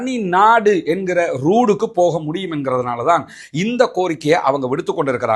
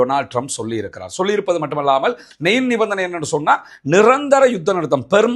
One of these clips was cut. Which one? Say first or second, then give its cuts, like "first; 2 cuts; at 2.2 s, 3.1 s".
second; 1 cut; at 2.2 s